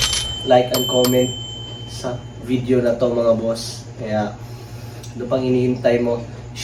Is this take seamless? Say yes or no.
yes